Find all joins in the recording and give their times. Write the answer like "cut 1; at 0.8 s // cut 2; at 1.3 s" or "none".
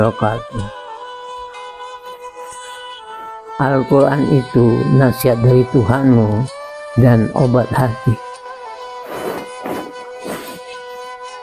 cut 1; at 0.8 s // cut 2; at 3.6 s